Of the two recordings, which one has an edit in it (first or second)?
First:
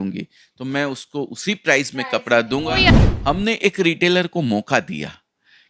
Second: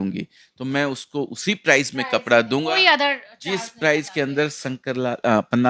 first